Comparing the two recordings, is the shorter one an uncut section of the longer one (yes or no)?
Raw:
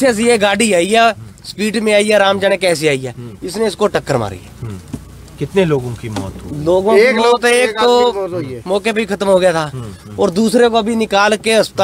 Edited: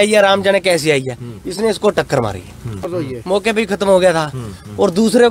no